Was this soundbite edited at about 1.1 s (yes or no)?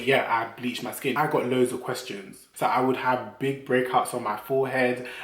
yes